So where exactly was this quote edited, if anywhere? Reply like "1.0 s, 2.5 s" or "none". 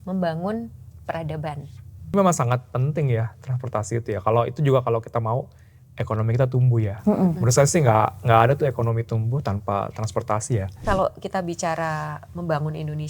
2.1 s, 10.8 s